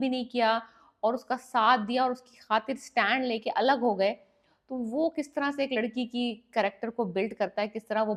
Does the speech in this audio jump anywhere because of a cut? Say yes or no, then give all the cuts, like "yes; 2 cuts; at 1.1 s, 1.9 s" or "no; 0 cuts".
no; 0 cuts